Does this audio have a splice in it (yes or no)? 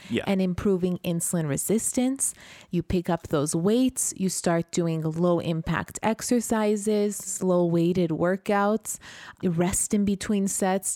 no